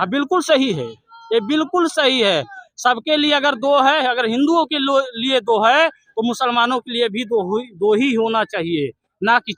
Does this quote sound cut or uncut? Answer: uncut